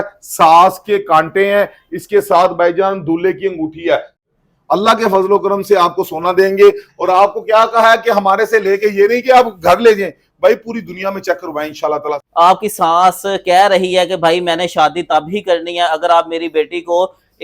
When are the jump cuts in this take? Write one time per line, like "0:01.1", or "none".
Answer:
0:04.2
0:12.2